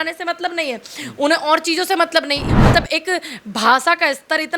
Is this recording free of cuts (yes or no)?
no